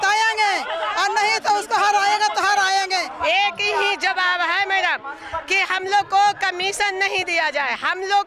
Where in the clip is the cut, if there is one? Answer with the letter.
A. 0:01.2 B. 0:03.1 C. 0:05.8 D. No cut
B